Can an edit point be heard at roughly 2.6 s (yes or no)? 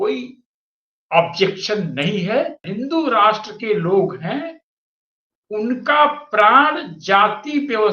yes